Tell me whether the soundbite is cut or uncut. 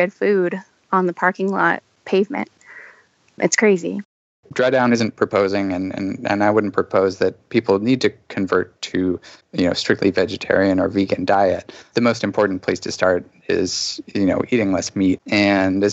cut